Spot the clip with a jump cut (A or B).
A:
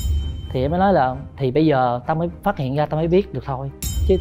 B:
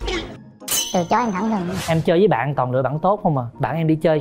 B